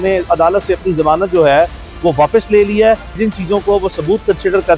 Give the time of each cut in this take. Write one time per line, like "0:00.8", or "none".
0:03.2